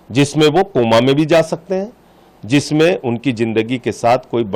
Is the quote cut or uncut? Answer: uncut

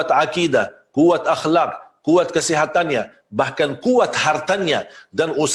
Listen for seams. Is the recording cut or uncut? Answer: uncut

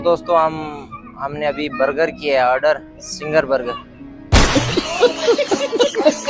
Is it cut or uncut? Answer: cut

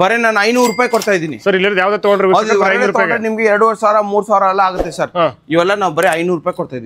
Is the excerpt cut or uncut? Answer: uncut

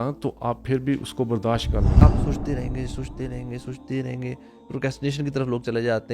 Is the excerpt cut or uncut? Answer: cut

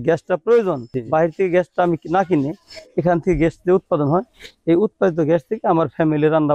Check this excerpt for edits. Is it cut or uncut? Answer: uncut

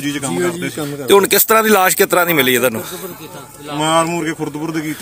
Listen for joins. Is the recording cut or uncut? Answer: uncut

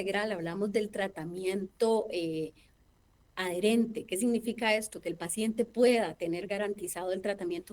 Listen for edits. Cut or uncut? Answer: uncut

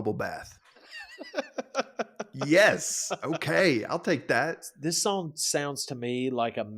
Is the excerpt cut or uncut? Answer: cut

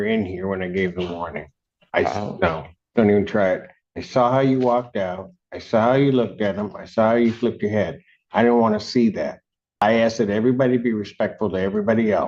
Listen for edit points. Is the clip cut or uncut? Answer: cut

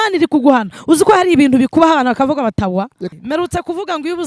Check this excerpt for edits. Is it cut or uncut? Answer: cut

